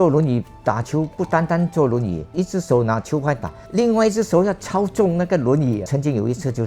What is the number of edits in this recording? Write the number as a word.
three